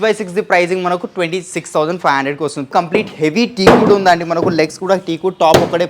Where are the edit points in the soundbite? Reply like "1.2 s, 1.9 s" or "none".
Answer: 2.7 s